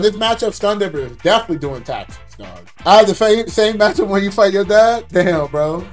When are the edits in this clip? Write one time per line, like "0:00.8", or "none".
0:02.6